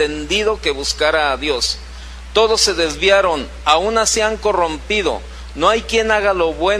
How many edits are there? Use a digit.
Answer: 1